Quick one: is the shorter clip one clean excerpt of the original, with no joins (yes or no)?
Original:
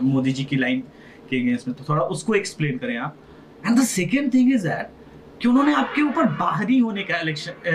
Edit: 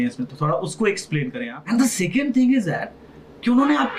no